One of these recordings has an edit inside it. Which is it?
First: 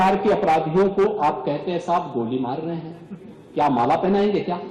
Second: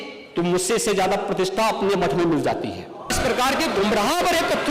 second; 1 cut; at 3.1 s

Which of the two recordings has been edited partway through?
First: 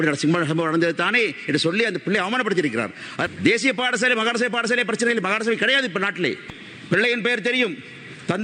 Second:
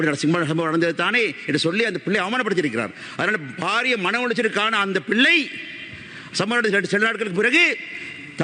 first; 2 cuts; at 3.3 s, 6.4 s

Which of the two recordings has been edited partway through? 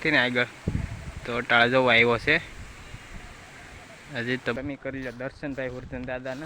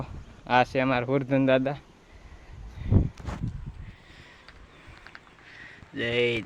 first; 1 cut; at 4.5 s

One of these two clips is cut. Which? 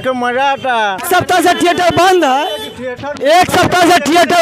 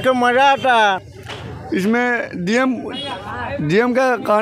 first; 1 cut; at 1.0 s

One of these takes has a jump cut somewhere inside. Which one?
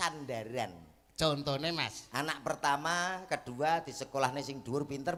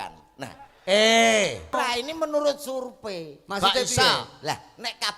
second; 1 cut; at 2.0 s

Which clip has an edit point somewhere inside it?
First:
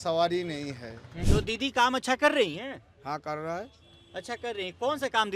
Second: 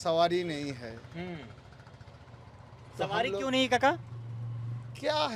first; 1 cut; at 1.1 s

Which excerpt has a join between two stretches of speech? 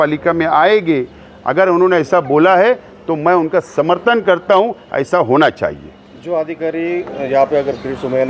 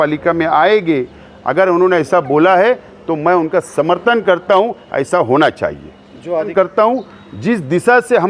second; 1 cut; at 6.5 s

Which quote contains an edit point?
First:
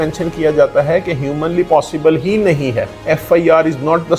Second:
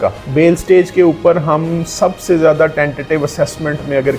first; 1 cut; at 2.9 s

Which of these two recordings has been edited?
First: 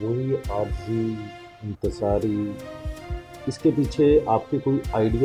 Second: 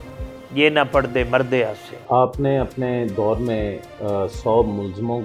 second; 1 cut; at 2.0 s

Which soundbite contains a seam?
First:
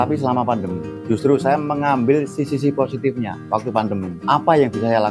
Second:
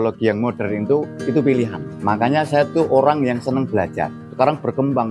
second; 3 cuts; at 1.1 s, 1.9 s, 4.1 s

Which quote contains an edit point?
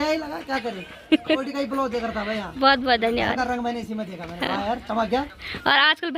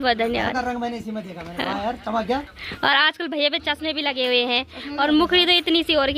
first; 1 cut; at 1.4 s

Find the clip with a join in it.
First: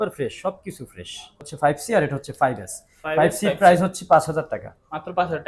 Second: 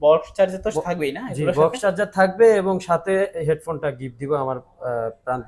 first; 1 cut; at 1.4 s

